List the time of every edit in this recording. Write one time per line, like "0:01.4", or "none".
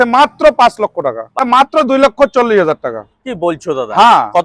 0:01.3